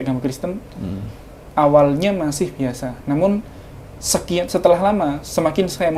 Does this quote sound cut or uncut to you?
uncut